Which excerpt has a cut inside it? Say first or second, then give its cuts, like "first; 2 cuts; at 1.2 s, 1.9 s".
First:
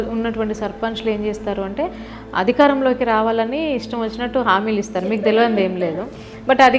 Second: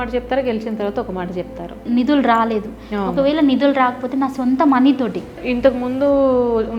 second; 2 cuts; at 1.8 s, 5.4 s